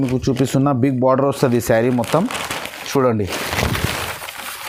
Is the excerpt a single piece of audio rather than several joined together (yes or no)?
yes